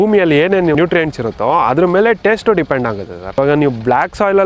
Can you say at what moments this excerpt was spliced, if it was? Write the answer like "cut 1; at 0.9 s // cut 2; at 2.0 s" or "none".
cut 1; at 0.8 s // cut 2; at 3.4 s